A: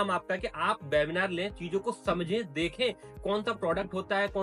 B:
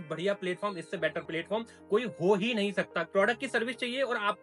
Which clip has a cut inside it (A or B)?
B